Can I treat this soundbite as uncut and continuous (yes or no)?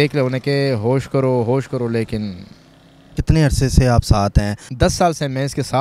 no